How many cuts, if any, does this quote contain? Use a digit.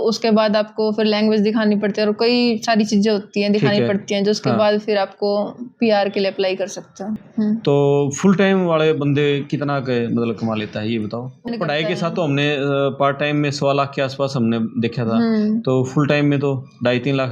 2